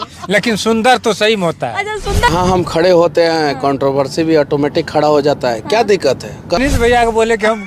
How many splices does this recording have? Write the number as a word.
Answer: two